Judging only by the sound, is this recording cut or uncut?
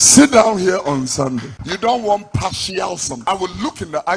cut